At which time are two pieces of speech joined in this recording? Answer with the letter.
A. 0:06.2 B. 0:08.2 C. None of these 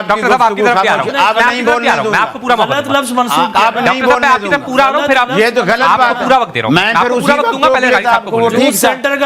C